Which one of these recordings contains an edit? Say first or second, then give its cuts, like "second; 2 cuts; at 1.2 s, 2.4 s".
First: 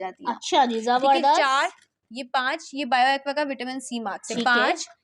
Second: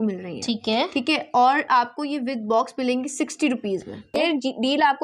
second; 1 cut; at 4.1 s